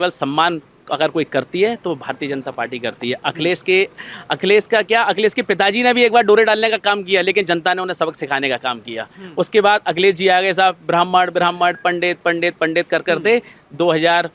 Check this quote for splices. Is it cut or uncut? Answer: uncut